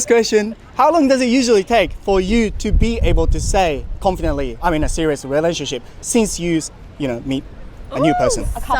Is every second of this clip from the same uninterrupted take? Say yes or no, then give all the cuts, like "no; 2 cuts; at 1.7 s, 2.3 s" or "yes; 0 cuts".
no; 1 cut; at 4.6 s